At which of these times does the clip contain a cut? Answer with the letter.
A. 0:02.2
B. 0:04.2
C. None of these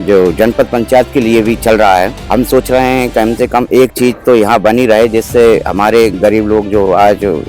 A